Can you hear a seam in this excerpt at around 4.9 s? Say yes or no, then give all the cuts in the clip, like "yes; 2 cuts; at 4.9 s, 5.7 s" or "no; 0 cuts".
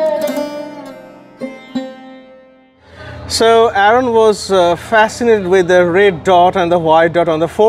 no; 1 cut; at 3.1 s